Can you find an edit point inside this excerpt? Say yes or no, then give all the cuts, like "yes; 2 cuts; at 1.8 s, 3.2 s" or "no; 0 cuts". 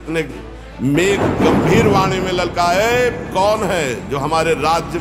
no; 0 cuts